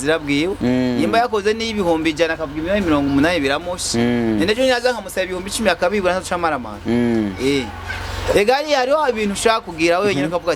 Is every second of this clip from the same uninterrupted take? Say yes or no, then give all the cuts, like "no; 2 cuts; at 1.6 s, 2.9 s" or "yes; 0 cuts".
yes; 0 cuts